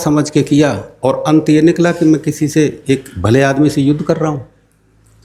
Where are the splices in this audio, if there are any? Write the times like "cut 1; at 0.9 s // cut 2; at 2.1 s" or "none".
none